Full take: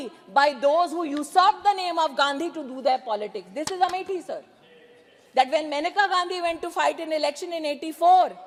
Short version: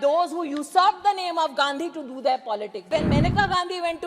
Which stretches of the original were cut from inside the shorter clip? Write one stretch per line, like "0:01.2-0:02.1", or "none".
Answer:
0:03.5-0:05.5